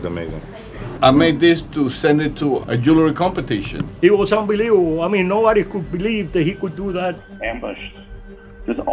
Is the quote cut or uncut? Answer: cut